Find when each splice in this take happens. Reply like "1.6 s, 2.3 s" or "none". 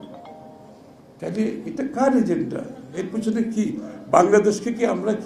none